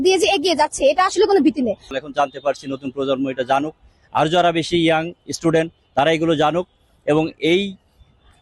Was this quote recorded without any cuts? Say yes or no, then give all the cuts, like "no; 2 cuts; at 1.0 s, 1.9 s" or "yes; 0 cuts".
no; 1 cut; at 1.9 s